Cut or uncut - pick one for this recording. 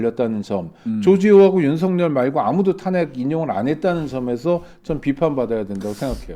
uncut